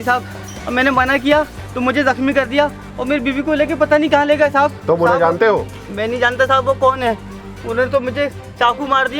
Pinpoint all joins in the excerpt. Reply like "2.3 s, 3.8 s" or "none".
4.8 s